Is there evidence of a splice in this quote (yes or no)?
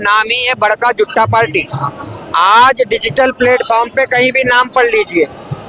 no